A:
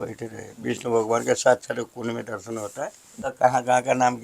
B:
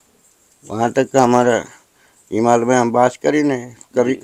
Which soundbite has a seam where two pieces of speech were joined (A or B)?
A